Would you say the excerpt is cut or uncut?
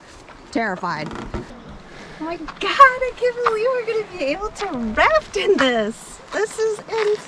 cut